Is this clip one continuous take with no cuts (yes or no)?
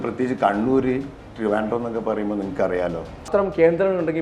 no